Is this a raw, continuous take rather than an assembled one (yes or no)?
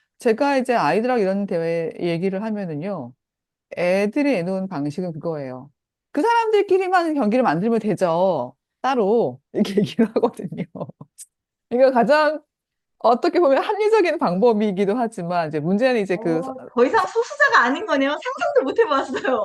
yes